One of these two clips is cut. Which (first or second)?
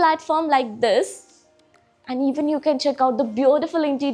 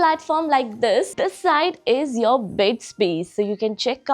second